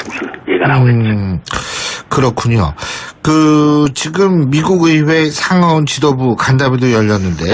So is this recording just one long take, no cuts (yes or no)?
no